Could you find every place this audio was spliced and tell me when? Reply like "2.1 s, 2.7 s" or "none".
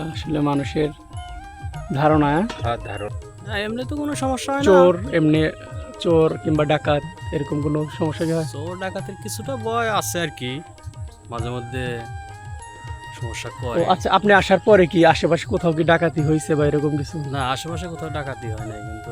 3.1 s